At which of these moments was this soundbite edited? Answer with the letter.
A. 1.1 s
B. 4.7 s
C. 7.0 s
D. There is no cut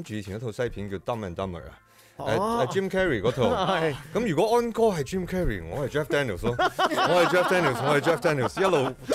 D